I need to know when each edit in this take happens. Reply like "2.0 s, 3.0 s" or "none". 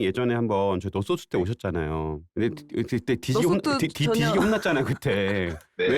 2.2 s